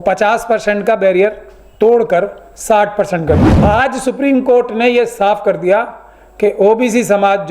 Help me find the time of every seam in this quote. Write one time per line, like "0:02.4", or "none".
0:03.5